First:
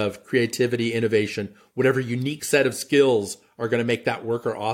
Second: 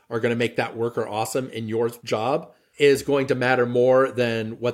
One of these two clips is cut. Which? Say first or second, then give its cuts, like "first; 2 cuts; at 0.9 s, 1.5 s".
second; 1 cut; at 2.2 s